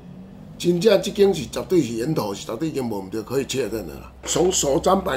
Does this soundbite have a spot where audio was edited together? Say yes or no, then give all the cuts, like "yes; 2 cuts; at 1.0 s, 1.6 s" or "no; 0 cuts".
yes; 1 cut; at 4.2 s